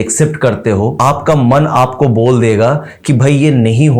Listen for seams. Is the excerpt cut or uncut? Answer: cut